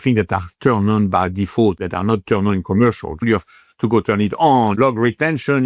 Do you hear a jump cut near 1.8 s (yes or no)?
yes